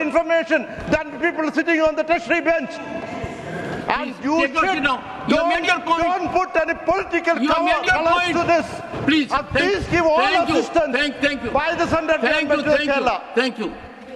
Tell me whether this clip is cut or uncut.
uncut